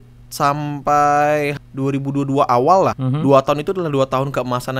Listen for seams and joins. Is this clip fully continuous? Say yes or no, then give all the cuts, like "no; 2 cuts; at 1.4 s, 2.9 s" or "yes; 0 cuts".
no; 2 cuts; at 1.6 s, 3.0 s